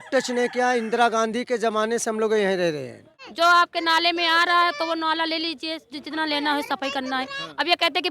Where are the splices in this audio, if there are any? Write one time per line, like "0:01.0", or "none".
0:03.2